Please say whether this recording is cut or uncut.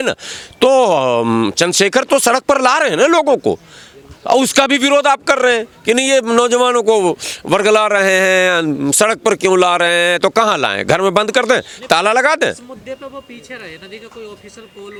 uncut